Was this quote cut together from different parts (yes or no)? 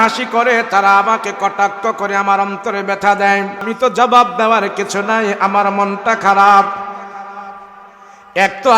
yes